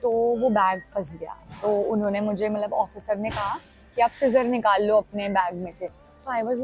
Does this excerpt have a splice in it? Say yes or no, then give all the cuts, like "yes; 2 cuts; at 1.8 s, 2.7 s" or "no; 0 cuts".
no; 0 cuts